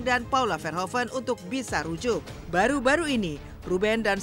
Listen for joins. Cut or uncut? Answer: cut